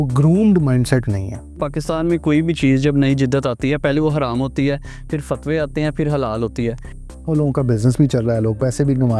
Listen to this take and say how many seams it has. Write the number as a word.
two